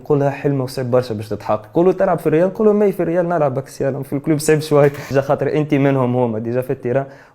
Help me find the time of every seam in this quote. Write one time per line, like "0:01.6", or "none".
0:05.1